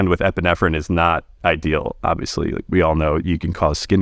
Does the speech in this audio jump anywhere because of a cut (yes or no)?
no